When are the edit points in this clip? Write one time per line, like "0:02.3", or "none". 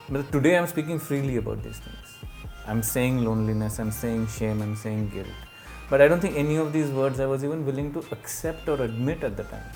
none